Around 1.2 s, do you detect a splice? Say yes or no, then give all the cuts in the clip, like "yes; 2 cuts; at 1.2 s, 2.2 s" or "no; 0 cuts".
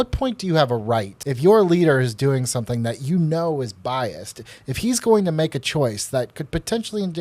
yes; 1 cut; at 1.2 s